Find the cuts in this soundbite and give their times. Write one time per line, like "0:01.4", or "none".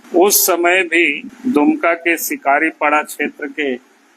0:01.3

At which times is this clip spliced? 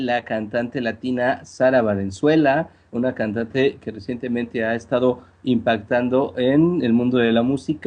none

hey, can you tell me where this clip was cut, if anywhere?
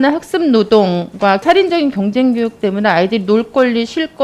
0:01.4

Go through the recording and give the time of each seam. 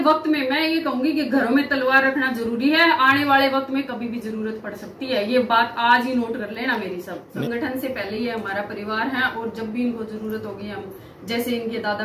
0:07.2

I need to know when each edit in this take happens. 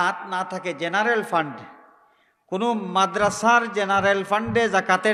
none

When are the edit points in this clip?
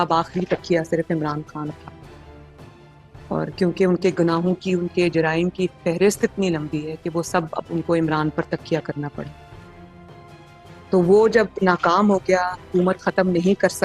0:09.3
0:10.8

